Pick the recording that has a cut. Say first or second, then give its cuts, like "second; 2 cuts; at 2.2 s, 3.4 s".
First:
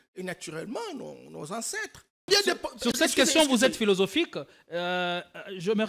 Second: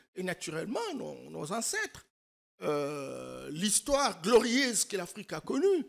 first; 1 cut; at 2.3 s